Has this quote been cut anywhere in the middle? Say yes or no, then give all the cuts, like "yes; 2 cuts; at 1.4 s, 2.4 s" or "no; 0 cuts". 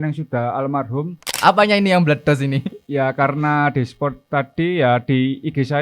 yes; 1 cut; at 1.3 s